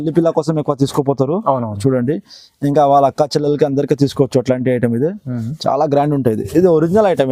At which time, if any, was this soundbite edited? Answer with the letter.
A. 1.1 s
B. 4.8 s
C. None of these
C